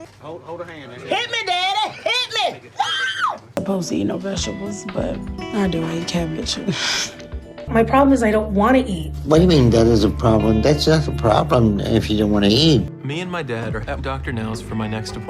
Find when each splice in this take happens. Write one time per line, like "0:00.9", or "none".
0:03.4
0:07.6
0:13.0